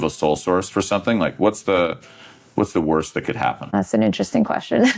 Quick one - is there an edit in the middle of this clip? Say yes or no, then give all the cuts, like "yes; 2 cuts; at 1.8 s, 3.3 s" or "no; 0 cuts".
yes; 1 cut; at 3.7 s